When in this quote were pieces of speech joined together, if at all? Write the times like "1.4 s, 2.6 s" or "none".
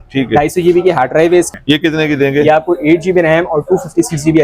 1.5 s